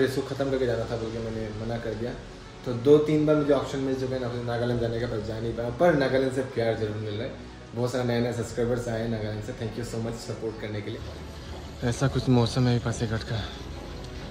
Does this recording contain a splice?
yes; 1 cut; at 11.0 s

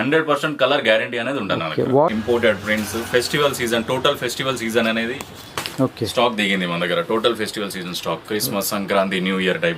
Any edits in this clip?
yes; 1 cut; at 2.1 s

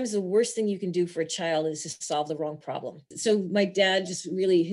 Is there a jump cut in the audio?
yes; 1 cut; at 3.1 s

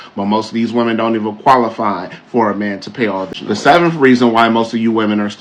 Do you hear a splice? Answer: yes; 1 cut; at 3.3 s

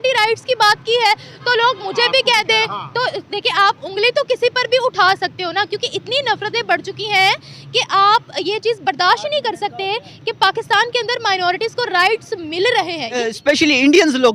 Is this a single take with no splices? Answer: no; 1 cut; at 13.3 s

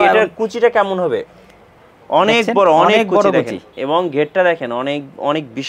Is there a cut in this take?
no; 0 cuts

